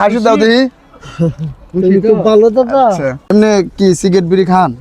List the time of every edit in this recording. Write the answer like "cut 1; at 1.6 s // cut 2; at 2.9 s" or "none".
cut 1; at 3.1 s